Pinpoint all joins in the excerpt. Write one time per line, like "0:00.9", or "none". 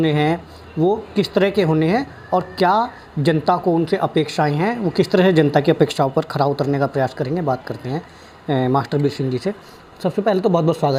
none